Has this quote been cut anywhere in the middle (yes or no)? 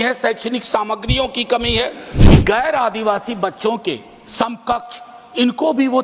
yes